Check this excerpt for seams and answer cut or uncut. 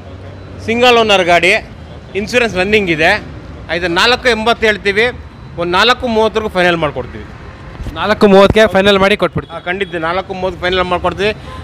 uncut